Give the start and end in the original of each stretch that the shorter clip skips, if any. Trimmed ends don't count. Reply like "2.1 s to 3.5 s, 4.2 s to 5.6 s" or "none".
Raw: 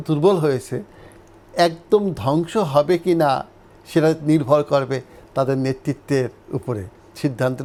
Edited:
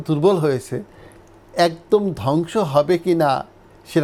none